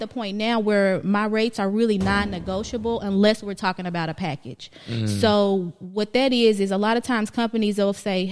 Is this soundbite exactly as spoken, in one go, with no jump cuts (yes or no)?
yes